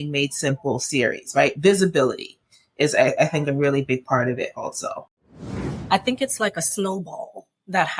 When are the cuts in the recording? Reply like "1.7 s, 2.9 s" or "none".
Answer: 5.7 s